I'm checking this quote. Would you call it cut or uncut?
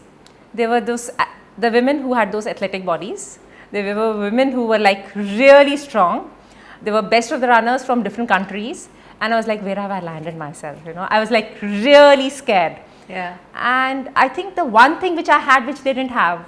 uncut